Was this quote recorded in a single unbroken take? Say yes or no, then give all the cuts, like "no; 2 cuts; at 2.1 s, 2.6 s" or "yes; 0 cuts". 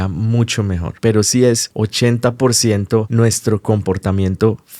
no; 3 cuts; at 0.9 s, 1.7 s, 3.1 s